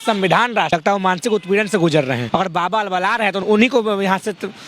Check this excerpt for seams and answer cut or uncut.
cut